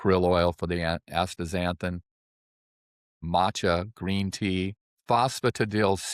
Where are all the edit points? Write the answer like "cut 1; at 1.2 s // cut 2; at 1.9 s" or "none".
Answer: cut 1; at 4.9 s